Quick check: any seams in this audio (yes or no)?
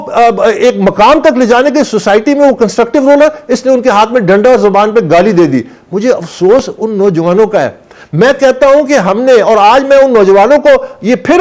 no